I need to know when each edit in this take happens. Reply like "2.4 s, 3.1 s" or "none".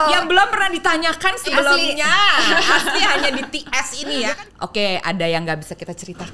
4.3 s